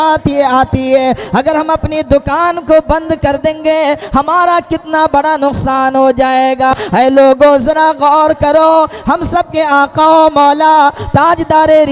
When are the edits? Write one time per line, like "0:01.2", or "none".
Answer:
0:06.7